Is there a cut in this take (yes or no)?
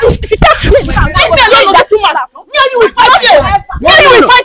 no